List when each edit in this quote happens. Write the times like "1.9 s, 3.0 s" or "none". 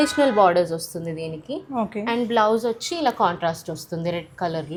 none